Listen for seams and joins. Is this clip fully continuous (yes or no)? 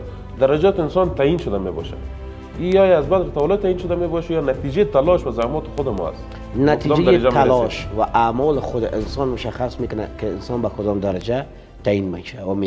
yes